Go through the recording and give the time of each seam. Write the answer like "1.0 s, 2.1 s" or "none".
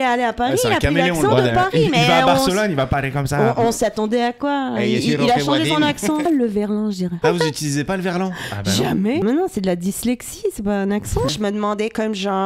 6.2 s, 7.2 s, 9.2 s, 11.3 s